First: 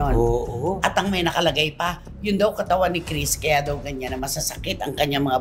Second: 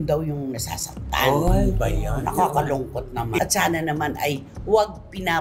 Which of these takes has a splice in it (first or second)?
second